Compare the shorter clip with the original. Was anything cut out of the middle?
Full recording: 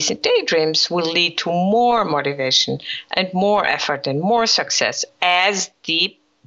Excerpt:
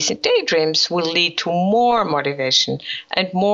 no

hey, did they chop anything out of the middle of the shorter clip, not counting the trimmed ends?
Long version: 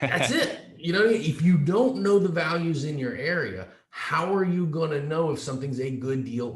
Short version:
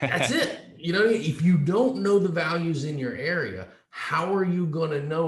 no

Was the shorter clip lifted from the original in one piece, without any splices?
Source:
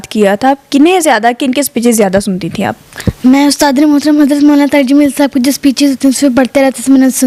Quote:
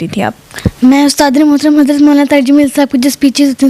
yes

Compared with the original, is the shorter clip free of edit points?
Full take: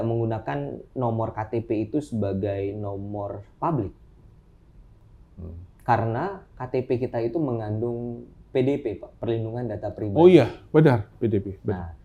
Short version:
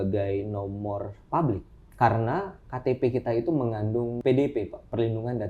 no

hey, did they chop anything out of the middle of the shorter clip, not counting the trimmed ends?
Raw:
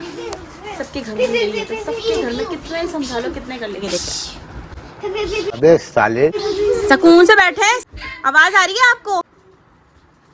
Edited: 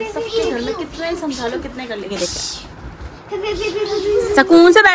yes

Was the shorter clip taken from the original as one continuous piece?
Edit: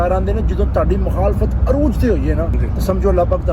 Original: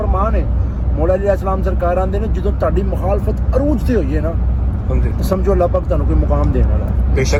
no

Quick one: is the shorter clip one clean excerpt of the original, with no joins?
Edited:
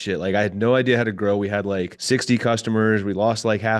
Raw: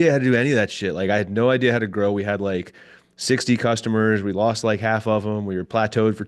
no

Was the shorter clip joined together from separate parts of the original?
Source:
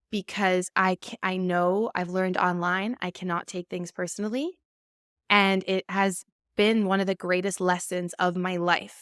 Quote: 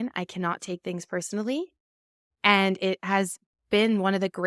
no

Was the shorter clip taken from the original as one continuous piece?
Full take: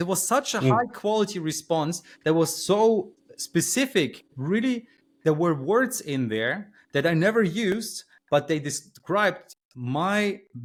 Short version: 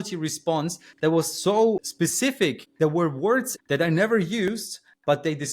no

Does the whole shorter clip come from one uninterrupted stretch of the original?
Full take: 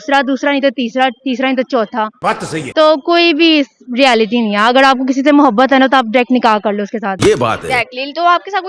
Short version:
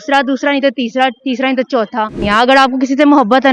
no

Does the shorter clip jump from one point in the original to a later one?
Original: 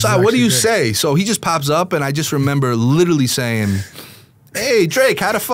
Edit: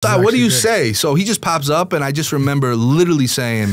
no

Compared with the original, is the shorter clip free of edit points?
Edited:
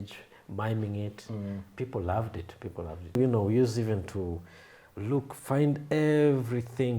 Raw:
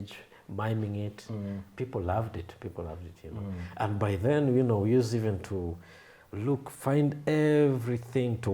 no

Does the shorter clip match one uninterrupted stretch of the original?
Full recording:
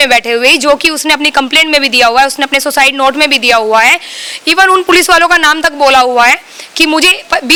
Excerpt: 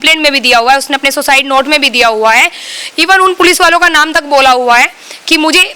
yes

